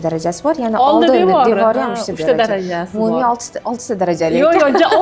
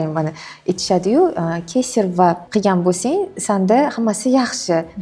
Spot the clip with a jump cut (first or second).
second